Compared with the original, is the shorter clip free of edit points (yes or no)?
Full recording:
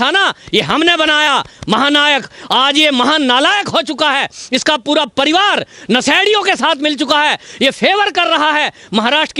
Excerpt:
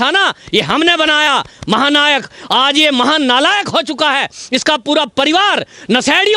yes